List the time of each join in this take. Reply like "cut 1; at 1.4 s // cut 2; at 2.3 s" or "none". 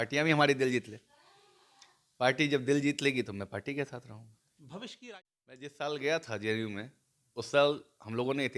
cut 1; at 4.9 s